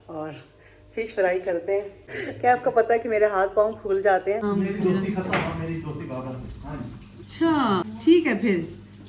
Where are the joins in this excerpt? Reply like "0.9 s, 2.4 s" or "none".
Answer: 2.1 s, 4.4 s, 7.9 s